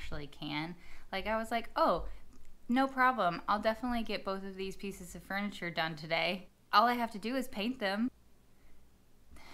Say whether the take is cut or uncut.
cut